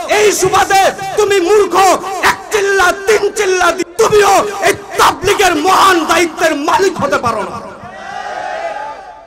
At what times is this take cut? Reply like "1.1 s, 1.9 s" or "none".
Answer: 3.8 s